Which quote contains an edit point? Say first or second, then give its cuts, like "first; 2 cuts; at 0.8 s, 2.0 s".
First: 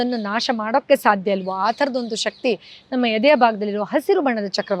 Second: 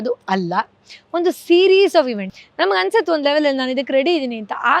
second; 1 cut; at 2.2 s